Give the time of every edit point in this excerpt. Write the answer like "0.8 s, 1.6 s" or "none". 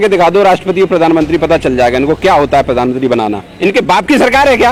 none